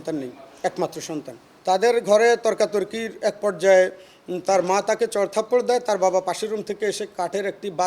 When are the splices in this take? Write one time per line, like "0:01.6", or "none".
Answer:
0:01.5